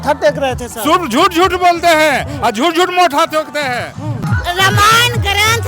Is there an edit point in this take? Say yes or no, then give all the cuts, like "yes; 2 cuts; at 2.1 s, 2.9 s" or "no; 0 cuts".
yes; 1 cut; at 4.2 s